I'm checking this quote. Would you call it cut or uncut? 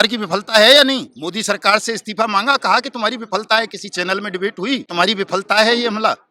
cut